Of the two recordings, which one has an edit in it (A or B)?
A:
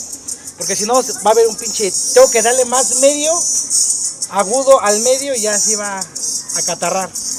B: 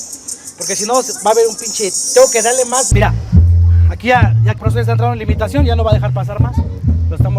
B